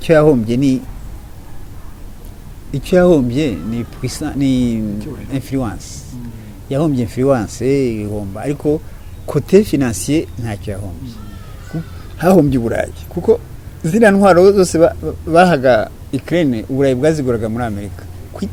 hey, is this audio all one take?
yes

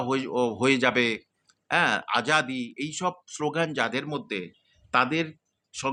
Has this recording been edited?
no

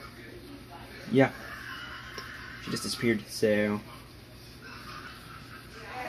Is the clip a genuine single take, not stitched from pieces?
no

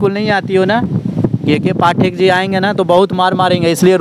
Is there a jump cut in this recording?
no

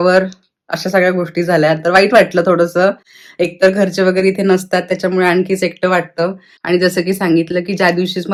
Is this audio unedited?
yes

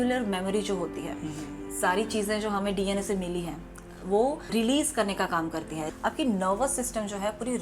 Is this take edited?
yes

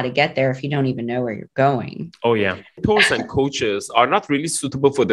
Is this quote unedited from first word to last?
no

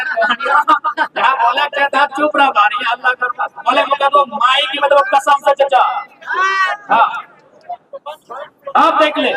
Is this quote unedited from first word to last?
yes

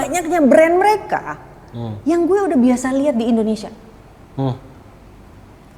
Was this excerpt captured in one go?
yes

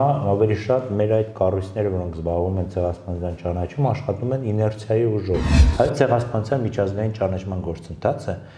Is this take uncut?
no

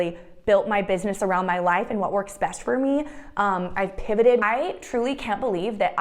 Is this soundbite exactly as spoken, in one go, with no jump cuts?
no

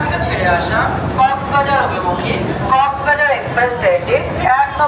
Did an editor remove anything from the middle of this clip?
no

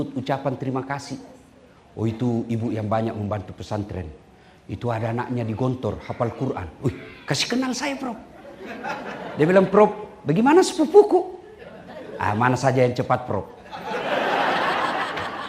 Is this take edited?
no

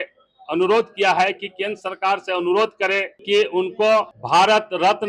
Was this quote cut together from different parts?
yes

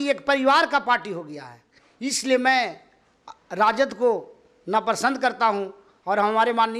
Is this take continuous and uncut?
yes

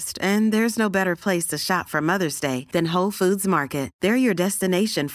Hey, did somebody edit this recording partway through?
no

